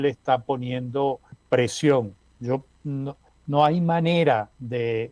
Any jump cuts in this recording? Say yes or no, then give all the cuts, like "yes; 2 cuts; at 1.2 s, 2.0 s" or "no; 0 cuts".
yes; 3 cuts; at 1.3 s, 2.2 s, 3.3 s